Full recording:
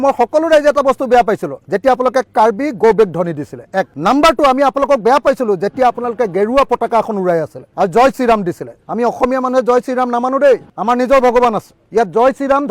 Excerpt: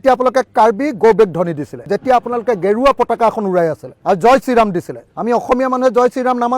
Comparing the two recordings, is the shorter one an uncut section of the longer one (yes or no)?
no